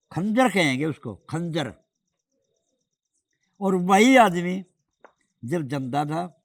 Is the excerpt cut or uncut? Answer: uncut